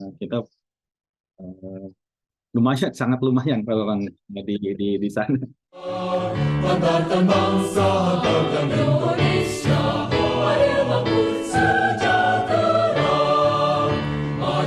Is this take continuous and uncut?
no; 1 cut; at 5.5 s

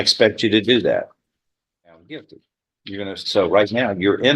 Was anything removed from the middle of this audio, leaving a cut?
yes; 1 cut; at 2.0 s

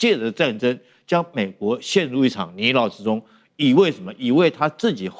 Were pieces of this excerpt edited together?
no; 0 cuts

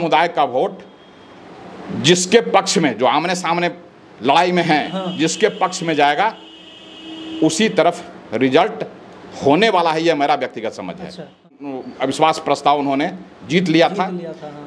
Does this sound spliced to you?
yes; 1 cut; at 11.5 s

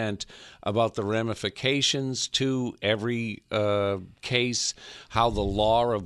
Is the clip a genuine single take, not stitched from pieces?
yes; 0 cuts

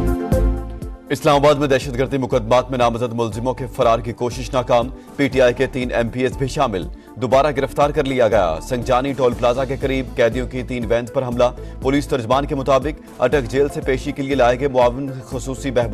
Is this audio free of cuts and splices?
yes; 0 cuts

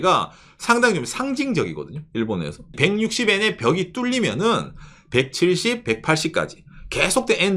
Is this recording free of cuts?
no; 1 cut; at 2.7 s

